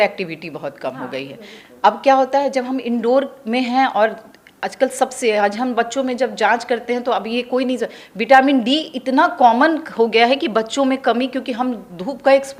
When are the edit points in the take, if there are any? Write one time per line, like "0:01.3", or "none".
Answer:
none

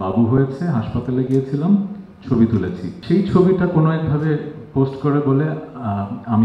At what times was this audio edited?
0:02.9

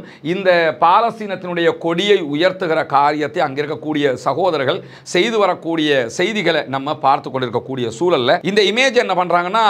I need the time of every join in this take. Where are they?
0:08.4

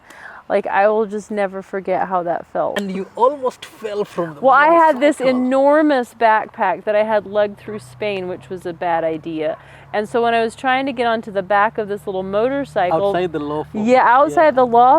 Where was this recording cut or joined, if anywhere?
0:02.8

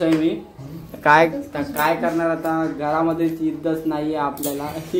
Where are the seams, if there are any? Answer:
none

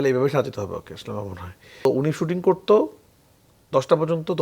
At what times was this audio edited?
0:01.8

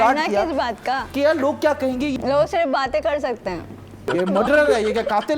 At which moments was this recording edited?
0:01.1
0:02.2
0:04.1

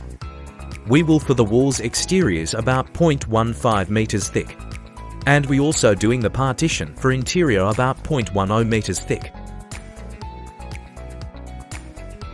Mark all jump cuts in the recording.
0:00.8
0:09.2

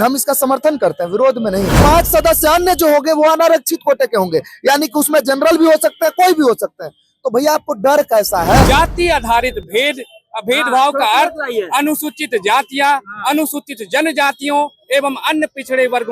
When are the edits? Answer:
0:01.8
0:08.6

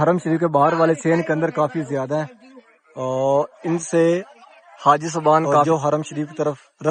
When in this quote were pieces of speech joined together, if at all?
0:05.7

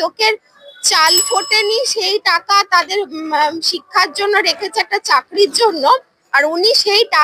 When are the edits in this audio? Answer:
none

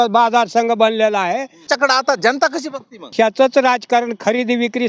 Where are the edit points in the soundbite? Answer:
0:01.6
0:03.1

